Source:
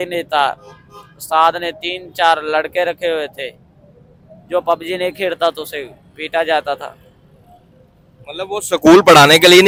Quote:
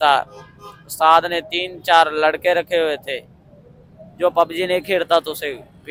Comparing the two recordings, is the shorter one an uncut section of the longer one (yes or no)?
yes